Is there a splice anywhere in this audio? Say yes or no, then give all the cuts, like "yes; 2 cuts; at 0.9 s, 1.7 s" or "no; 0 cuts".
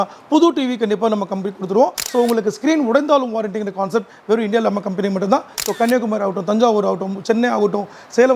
yes; 2 cuts; at 2.0 s, 5.5 s